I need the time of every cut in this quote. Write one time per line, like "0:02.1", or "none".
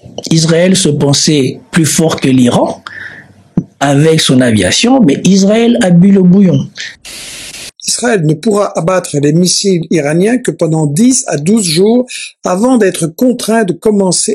0:07.4